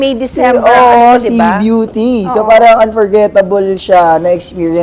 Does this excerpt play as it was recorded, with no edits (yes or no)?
yes